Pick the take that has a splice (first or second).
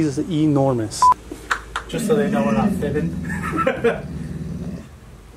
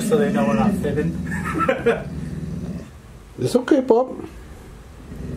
first